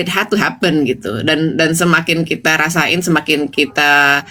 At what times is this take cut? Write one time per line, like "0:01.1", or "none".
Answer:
none